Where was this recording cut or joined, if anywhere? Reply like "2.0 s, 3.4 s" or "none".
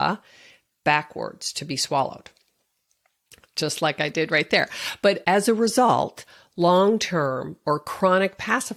none